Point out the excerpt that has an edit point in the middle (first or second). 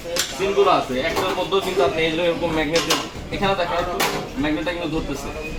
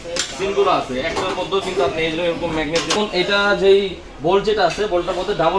second